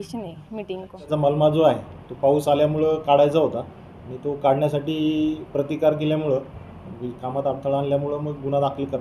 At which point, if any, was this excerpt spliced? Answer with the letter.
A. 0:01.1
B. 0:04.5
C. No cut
A